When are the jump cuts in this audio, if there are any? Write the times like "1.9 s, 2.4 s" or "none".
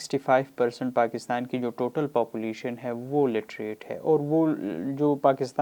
none